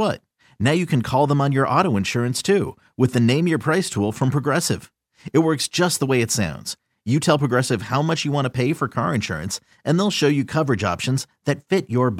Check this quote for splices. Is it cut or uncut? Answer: uncut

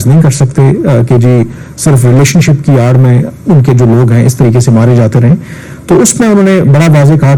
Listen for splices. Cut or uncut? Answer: uncut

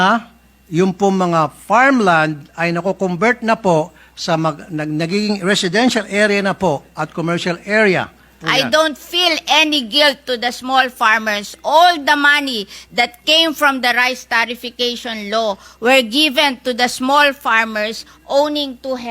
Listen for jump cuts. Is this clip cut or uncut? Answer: cut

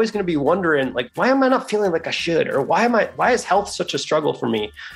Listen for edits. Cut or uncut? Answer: uncut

